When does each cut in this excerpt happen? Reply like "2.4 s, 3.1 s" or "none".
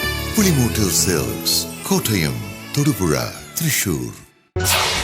3.9 s